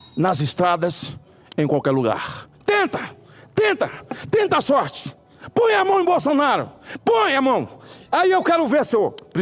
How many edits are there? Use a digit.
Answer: 1